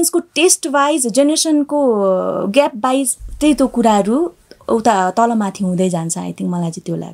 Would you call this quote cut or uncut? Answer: uncut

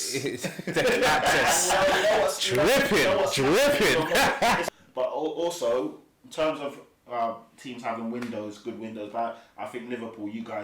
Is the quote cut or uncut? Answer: cut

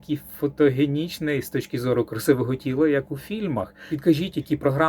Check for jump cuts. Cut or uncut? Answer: cut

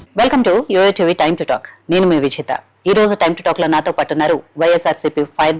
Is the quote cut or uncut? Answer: uncut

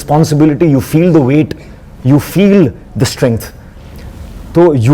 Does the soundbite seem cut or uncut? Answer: uncut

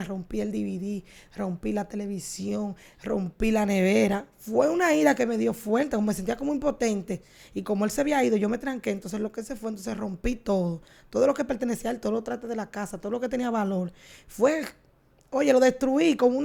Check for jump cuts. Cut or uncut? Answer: uncut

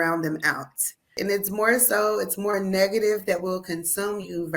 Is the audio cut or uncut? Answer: cut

